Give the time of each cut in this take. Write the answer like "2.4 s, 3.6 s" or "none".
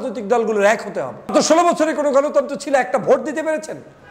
1.3 s

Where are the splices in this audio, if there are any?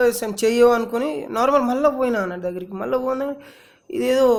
none

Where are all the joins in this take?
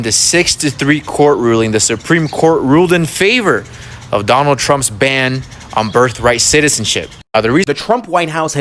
7.7 s

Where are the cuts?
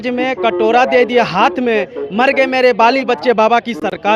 none

